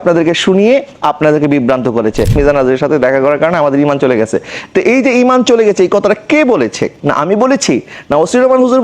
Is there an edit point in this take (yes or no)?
yes